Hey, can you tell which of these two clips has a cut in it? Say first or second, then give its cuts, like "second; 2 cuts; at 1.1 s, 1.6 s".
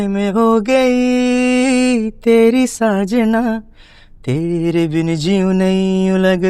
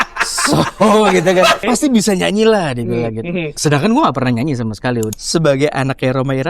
second; 3 cuts; at 1.6 s, 3.5 s, 5.2 s